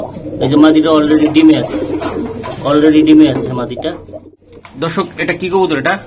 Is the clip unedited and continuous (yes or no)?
no